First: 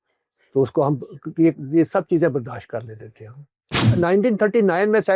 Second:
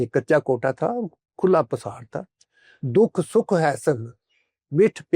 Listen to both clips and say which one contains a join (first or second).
first